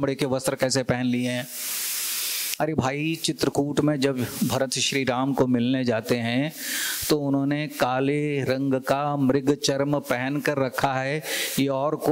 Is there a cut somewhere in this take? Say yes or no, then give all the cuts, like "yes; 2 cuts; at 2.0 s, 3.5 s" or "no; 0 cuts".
no; 0 cuts